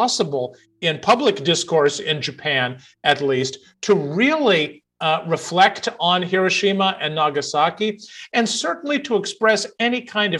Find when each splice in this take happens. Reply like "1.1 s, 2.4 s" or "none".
none

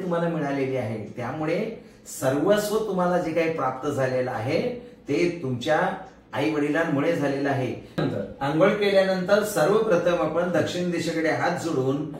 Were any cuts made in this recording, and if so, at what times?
8.0 s

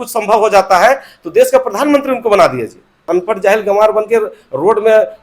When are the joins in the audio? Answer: 3.0 s

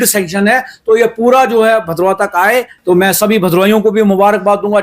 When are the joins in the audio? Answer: 2.7 s

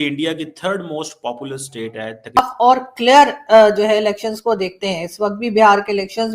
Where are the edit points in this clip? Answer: 2.4 s

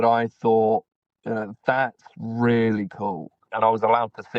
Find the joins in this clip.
3.5 s

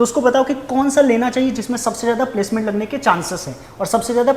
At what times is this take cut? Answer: none

